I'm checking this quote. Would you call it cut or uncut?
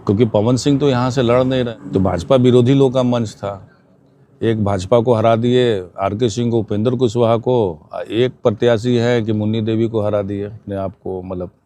cut